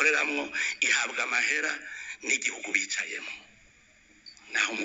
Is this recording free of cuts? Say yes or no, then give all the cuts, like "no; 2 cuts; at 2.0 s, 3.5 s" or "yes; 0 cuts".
yes; 0 cuts